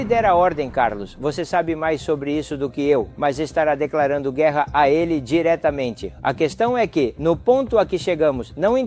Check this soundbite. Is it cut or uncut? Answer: uncut